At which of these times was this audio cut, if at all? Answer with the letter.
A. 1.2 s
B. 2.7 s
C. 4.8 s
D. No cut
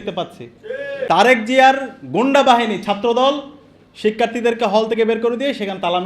A